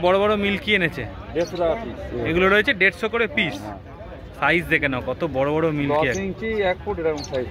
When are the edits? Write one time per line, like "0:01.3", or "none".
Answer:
none